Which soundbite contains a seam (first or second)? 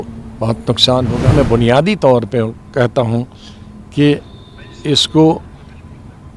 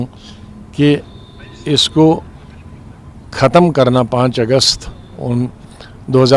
first